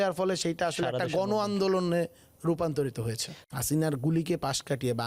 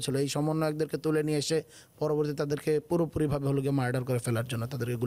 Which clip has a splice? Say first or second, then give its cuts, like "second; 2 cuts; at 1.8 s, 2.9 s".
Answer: first; 1 cut; at 3.4 s